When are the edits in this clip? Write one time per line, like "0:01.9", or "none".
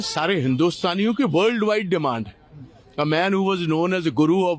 none